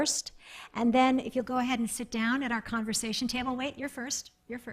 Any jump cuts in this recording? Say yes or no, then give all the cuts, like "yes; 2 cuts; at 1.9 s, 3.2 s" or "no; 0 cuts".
no; 0 cuts